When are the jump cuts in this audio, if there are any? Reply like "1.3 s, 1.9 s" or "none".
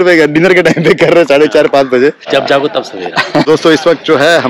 2.2 s, 3.5 s